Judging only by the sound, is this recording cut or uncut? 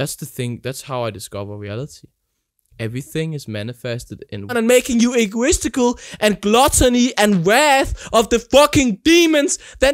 cut